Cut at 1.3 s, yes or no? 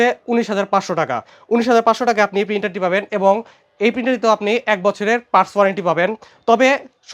no